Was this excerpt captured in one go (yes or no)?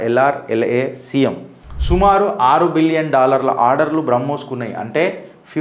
no